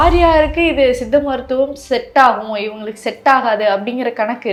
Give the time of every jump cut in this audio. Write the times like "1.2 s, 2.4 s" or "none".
none

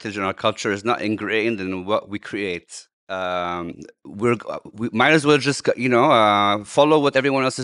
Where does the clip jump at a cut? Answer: none

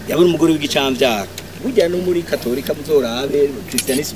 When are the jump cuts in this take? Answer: 1.6 s

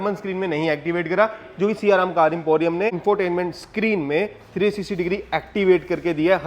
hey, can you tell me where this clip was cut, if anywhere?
3.0 s

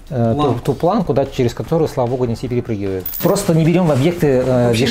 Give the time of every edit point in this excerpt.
3.2 s

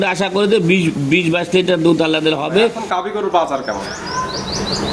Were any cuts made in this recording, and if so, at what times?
2.8 s

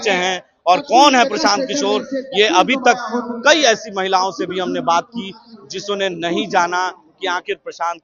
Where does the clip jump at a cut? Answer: none

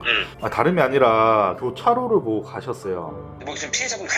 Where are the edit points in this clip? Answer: 1.6 s

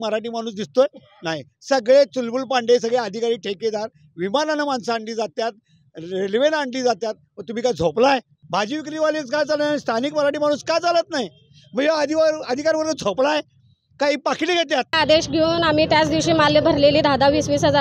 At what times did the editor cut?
8.4 s, 15.0 s

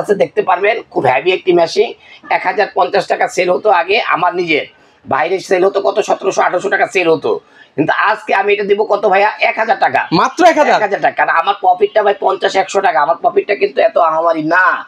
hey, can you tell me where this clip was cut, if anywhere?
none

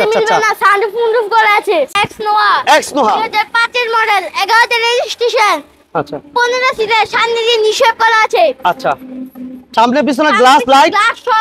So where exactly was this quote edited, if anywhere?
1.9 s

